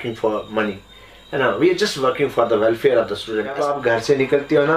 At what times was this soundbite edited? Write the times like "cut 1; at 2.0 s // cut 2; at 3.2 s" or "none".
cut 1; at 3.6 s